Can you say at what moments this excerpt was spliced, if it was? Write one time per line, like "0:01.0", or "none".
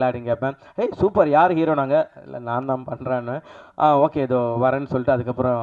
none